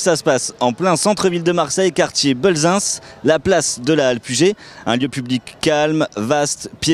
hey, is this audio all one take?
yes; 0 cuts

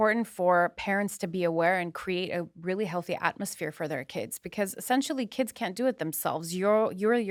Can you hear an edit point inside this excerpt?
no; 0 cuts

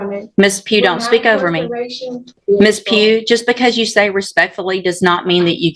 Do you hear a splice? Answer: yes; 1 cut; at 2.4 s

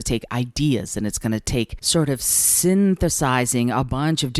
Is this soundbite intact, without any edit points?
no; 1 cut; at 1.8 s

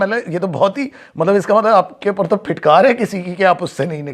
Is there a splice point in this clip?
no; 0 cuts

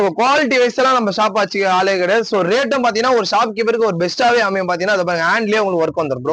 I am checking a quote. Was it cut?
no; 0 cuts

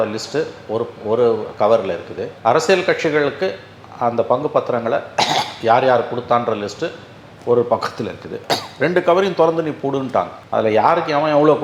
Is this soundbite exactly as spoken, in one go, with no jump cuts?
yes; 0 cuts

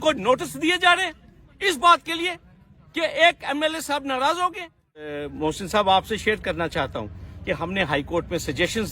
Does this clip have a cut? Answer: yes; 1 cut; at 5.2 s

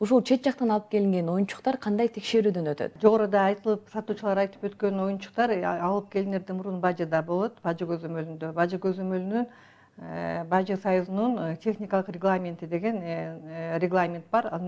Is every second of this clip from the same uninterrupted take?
yes; 0 cuts

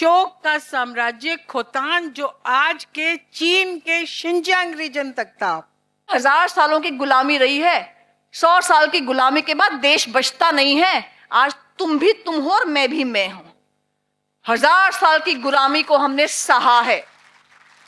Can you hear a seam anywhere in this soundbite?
yes; 1 cut; at 6.1 s

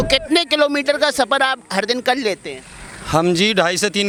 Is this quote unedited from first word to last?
yes; 0 cuts

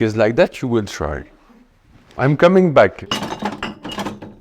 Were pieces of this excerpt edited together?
yes; 1 cut; at 3.0 s

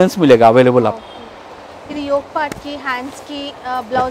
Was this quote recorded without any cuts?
yes; 0 cuts

